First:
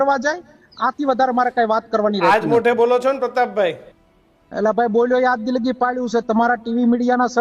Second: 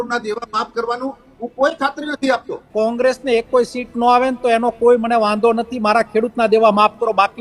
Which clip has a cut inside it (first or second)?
second